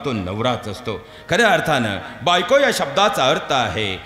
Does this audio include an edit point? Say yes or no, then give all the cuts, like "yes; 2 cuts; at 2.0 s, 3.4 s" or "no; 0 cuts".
no; 0 cuts